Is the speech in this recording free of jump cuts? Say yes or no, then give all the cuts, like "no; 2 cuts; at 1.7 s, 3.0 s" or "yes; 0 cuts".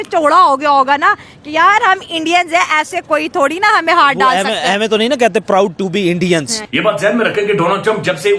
no; 1 cut; at 6.6 s